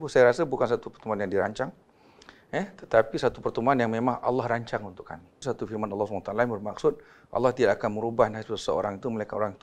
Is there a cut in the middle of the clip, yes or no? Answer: yes